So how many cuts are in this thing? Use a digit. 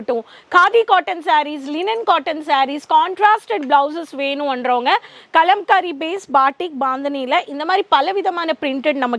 0